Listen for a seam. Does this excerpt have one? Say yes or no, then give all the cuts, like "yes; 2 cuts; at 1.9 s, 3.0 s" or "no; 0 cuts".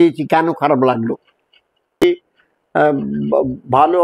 yes; 1 cut; at 2.0 s